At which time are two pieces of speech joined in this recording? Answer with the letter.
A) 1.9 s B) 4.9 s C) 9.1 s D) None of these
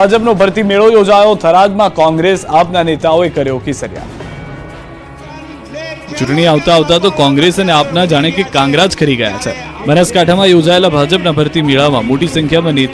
D